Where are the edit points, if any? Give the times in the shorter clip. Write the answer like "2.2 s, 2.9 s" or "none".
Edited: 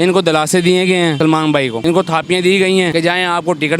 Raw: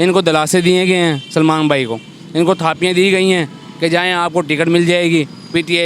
1.3 s, 2.9 s